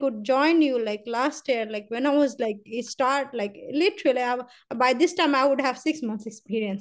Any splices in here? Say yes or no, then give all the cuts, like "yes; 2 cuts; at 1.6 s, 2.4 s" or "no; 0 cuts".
no; 0 cuts